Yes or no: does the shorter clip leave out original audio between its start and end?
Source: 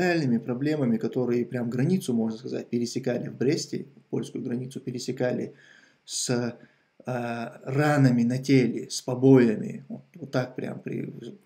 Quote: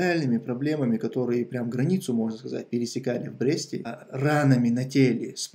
yes